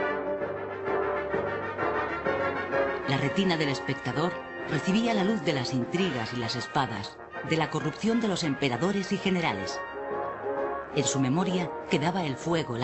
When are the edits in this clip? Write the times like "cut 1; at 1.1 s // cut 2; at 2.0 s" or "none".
cut 1; at 6.9 s